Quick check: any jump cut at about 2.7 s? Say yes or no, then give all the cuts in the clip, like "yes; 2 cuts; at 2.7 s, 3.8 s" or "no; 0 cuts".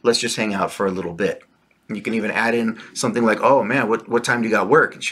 no; 0 cuts